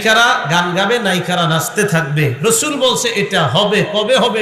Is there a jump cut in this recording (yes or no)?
no